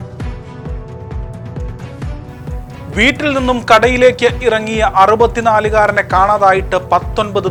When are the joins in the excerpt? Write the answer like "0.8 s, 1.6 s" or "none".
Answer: none